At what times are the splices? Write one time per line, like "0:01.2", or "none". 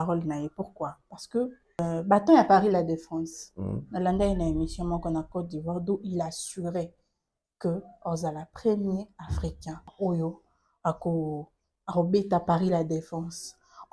0:01.8
0:09.9